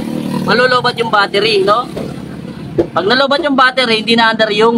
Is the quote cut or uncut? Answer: uncut